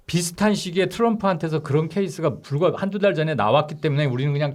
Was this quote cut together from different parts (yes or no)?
no